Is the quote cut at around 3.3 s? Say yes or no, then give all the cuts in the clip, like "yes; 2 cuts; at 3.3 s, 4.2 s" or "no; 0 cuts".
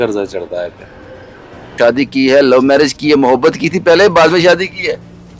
no; 1 cut; at 1.7 s